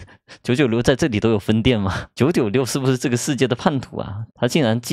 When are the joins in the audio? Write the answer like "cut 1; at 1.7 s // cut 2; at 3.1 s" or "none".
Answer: none